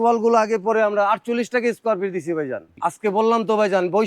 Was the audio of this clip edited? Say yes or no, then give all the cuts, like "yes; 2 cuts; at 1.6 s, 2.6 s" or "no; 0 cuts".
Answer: yes; 1 cut; at 2.7 s